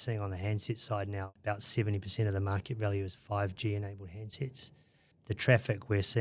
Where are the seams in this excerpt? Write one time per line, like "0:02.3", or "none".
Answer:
0:01.3
0:05.1